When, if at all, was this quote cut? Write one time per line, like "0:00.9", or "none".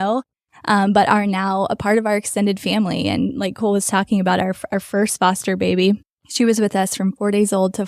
0:06.2